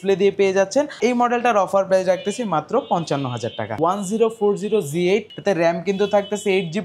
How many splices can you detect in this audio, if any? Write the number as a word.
three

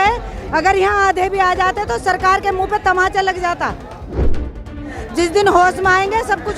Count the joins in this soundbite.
one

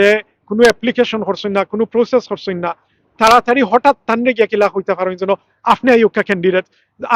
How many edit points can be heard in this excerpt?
zero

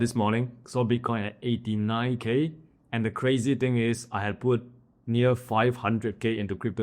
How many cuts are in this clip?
zero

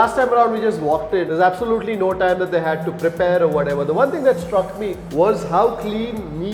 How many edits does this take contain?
one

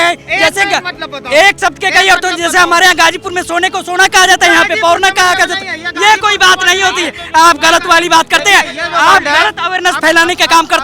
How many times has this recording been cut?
zero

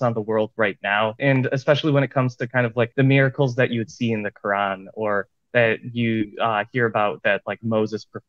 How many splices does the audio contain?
two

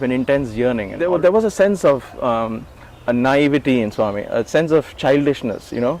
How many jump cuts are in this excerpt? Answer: one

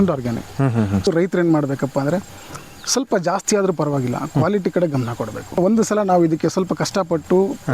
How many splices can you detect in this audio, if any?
two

